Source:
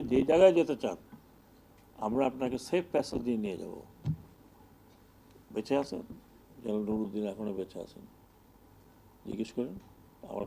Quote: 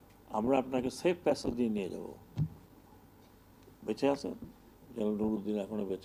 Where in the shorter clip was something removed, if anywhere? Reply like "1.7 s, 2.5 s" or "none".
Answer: none